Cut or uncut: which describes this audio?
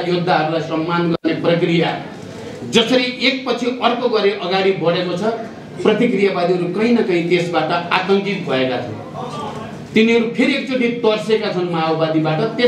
uncut